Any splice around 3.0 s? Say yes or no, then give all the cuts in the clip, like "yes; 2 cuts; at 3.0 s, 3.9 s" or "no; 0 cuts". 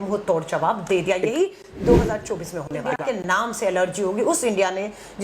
yes; 1 cut; at 3.0 s